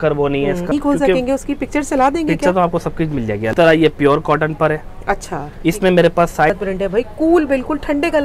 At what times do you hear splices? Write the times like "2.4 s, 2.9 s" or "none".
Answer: 0.7 s, 3.5 s, 6.5 s